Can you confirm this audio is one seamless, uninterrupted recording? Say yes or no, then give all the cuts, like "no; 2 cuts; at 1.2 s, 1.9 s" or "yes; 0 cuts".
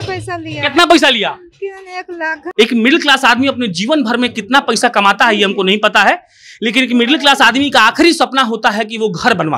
no; 1 cut; at 2.4 s